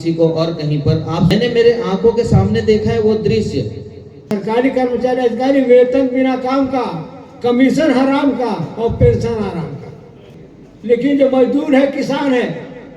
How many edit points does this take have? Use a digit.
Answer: 1